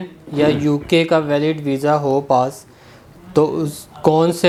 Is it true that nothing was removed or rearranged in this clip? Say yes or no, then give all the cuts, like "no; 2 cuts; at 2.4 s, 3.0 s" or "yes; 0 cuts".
yes; 0 cuts